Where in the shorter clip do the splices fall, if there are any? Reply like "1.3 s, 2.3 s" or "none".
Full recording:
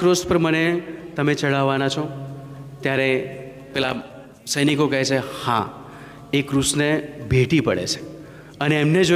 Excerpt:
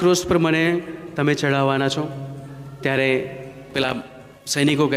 none